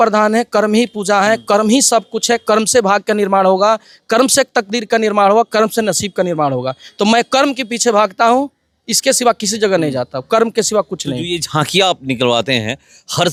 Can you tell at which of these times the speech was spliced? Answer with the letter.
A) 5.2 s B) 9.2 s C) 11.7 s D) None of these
D